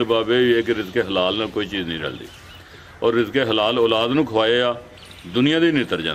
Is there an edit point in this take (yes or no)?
no